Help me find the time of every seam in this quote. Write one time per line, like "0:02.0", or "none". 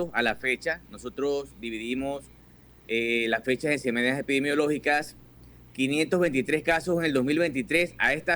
none